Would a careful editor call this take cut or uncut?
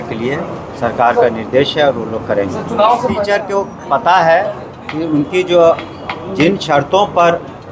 cut